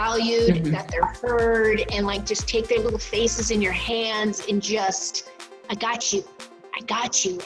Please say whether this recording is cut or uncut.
uncut